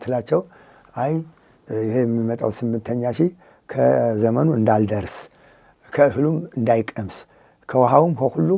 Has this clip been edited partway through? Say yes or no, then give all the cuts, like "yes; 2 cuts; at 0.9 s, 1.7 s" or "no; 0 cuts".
no; 0 cuts